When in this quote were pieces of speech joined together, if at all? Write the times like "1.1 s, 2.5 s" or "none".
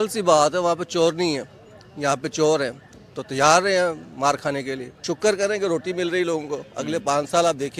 4.9 s